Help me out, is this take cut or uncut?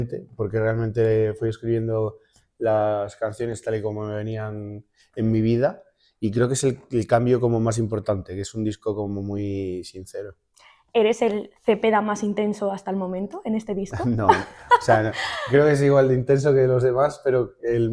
uncut